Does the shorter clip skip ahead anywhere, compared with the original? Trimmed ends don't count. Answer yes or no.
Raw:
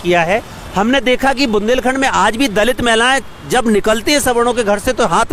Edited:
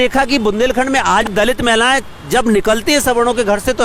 yes